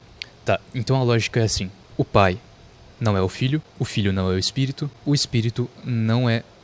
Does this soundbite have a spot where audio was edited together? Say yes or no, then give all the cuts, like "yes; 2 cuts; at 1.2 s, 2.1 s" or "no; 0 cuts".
no; 0 cuts